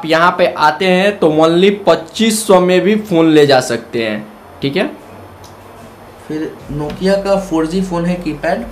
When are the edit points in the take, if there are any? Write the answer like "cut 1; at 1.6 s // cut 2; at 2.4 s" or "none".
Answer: none